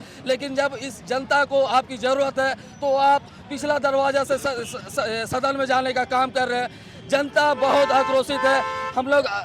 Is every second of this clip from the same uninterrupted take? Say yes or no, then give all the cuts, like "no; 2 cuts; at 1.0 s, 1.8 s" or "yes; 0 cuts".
yes; 0 cuts